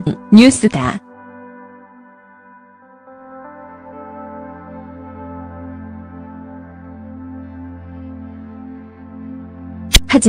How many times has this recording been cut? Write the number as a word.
one